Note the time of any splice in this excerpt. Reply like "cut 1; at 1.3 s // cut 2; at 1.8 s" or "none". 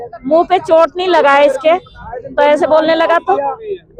none